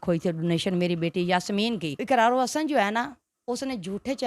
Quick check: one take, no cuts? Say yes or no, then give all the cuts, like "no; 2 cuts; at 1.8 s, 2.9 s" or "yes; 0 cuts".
no; 1 cut; at 2.0 s